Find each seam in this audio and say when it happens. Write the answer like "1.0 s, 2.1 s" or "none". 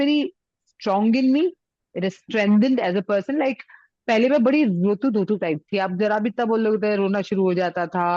none